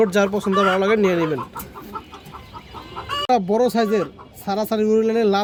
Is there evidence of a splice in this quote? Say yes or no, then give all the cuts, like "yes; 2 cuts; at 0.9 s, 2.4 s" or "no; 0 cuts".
no; 0 cuts